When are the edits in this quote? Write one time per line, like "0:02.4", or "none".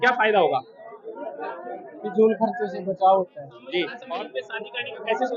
0:04.0